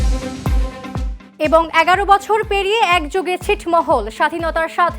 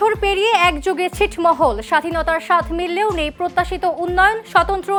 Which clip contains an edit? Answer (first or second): first